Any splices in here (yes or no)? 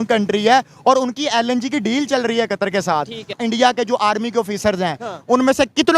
yes